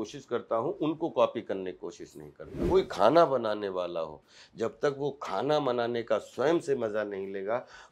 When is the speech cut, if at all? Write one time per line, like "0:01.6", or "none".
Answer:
0:02.6